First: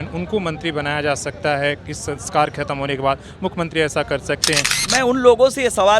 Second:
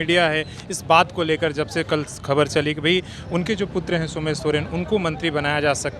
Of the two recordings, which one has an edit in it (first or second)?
first